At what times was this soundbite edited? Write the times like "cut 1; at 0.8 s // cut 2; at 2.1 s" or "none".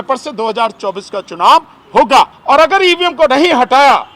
cut 1; at 2.4 s